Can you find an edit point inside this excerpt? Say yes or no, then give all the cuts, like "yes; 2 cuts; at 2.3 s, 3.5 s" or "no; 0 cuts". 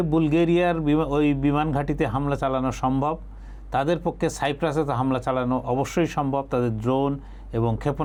no; 0 cuts